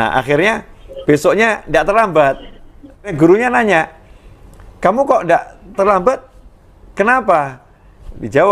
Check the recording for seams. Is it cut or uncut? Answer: cut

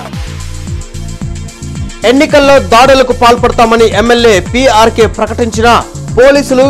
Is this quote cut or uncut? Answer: cut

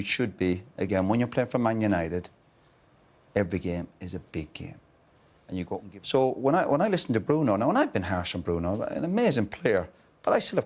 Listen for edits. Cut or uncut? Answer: cut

